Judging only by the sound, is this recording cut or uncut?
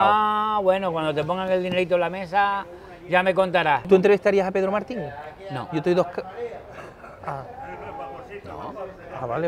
cut